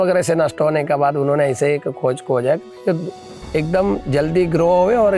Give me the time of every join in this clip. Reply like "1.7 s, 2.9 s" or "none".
none

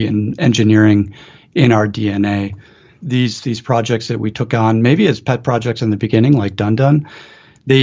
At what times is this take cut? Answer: 3.0 s

